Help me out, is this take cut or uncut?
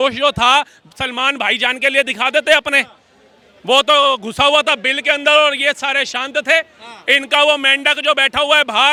uncut